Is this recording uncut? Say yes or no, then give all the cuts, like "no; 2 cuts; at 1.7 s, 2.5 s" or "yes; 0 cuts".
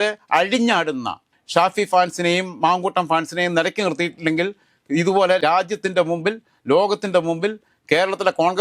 yes; 0 cuts